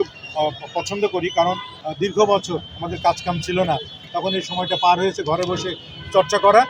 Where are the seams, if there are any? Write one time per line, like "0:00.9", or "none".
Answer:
0:01.7

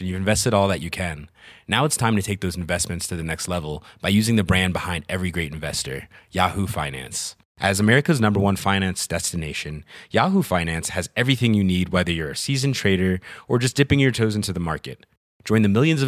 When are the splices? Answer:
none

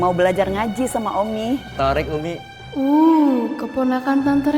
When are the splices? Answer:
0:01.7
0:02.5

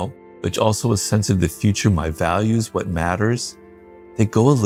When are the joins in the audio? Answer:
none

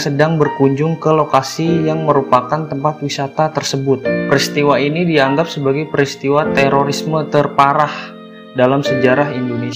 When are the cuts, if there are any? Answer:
0:04.1

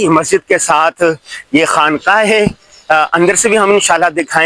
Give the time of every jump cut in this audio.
none

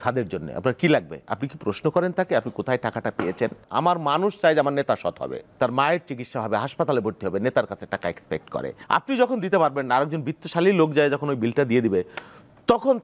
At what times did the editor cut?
0:03.6
0:05.5
0:08.7

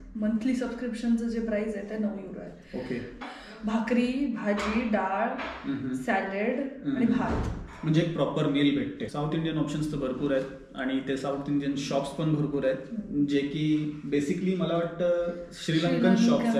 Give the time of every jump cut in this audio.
0:03.2
0:09.0

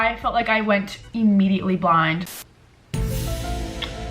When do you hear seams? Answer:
0:02.2

